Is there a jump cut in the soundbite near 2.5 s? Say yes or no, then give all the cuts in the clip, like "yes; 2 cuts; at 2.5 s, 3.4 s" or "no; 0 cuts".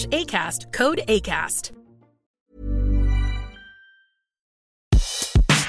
no; 1 cut; at 4.6 s